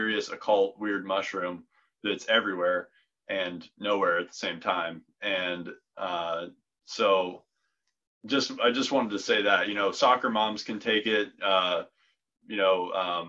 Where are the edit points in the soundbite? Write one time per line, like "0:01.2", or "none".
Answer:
none

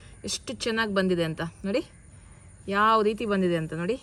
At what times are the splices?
none

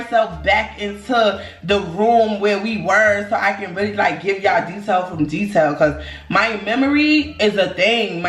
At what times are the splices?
none

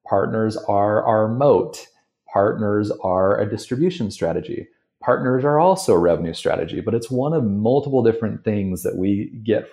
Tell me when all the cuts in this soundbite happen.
none

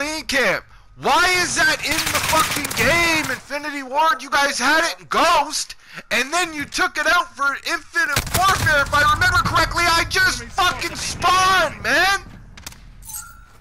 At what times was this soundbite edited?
none

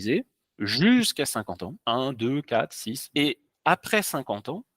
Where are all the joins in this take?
0:03.0

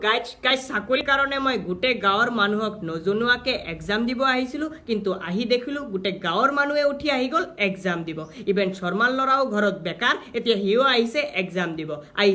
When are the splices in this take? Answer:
0:01.0

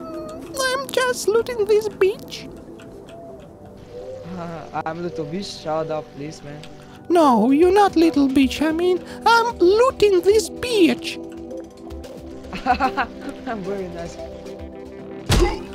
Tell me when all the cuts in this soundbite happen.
0:11.0
0:12.6

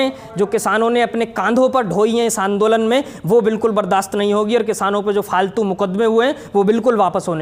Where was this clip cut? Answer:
none

